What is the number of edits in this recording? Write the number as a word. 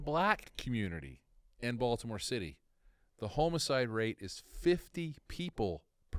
zero